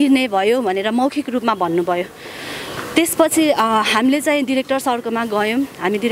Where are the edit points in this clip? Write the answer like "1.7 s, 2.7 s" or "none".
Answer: none